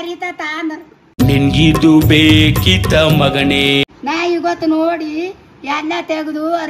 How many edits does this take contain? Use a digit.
1